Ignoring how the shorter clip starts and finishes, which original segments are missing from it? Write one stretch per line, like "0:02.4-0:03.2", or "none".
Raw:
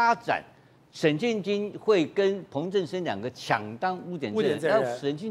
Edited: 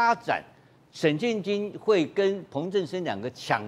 none